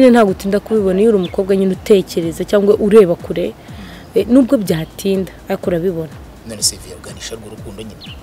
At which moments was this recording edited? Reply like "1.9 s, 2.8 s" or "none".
none